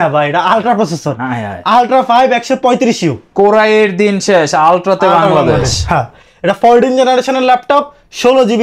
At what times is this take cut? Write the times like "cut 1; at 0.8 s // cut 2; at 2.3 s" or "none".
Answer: none